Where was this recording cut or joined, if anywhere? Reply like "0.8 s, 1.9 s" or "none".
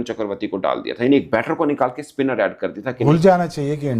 3.0 s